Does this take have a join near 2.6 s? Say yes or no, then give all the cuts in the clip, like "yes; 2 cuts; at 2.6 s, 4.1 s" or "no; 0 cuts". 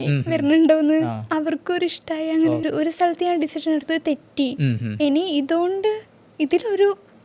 yes; 1 cut; at 2.6 s